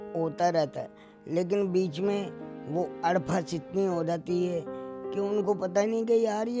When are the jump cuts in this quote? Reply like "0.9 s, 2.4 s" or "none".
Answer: none